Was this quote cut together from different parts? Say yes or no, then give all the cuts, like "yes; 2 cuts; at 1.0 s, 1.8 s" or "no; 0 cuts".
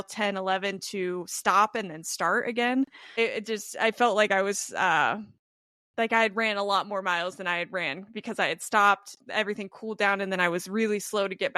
yes; 1 cut; at 3.1 s